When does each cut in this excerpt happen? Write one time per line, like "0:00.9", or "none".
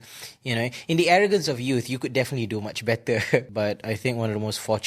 0:03.5